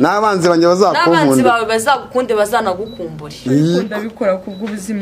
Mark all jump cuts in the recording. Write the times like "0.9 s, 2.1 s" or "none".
4.0 s